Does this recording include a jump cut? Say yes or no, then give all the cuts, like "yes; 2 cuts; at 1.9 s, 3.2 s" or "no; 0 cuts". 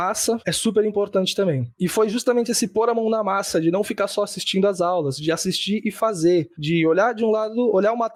no; 0 cuts